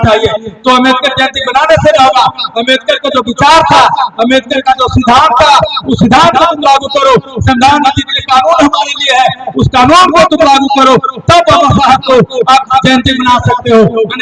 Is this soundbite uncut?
yes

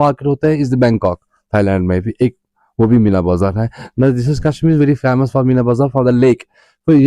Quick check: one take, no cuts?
yes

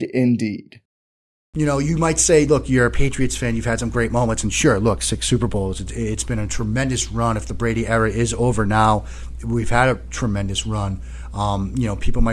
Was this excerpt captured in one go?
no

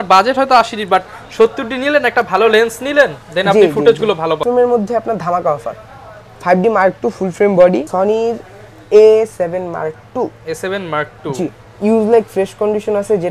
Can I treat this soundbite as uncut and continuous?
no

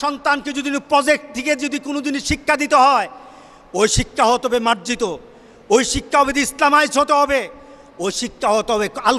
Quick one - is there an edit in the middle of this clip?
no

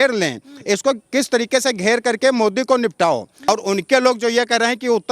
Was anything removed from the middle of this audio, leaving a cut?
yes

